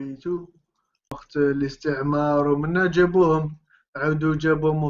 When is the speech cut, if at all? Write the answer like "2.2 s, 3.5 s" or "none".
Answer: 1.2 s